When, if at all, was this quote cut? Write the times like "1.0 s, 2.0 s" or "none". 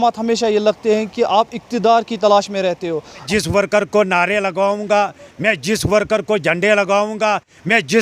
3.2 s